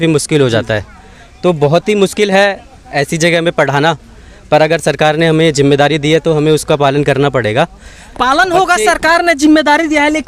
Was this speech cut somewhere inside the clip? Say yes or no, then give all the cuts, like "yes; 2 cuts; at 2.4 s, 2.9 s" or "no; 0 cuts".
no; 0 cuts